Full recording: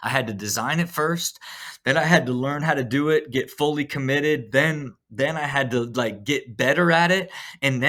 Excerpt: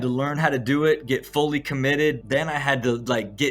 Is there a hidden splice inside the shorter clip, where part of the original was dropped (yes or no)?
yes